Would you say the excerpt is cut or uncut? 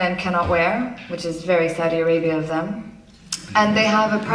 uncut